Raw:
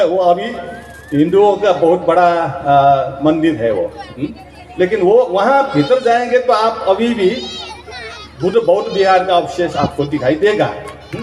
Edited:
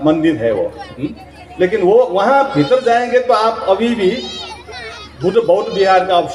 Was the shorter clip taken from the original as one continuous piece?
yes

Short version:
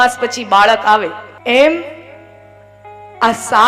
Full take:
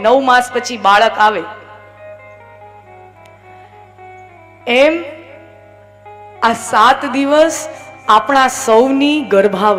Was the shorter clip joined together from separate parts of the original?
yes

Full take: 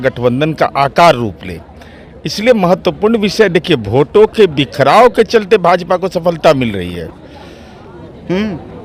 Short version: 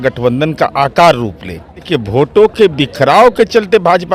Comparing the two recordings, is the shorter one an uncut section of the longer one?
no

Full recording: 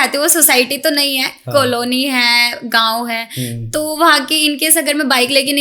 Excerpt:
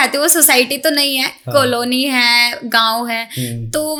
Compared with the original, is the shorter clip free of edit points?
yes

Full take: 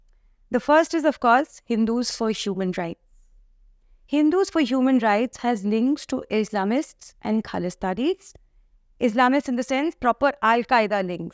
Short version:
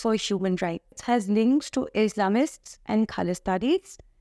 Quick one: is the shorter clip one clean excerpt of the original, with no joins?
no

